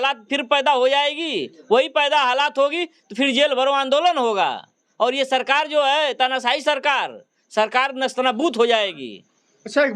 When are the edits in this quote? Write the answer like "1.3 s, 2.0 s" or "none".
none